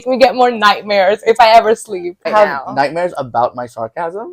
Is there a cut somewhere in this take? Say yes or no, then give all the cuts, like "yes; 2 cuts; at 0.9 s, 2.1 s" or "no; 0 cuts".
yes; 1 cut; at 2.3 s